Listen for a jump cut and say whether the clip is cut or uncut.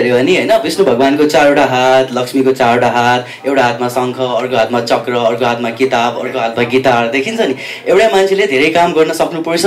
uncut